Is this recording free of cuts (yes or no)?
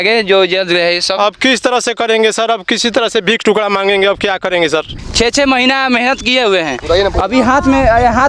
no